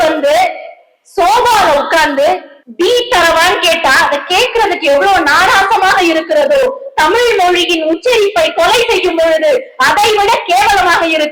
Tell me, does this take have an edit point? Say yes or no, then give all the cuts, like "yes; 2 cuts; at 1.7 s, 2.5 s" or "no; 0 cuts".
no; 0 cuts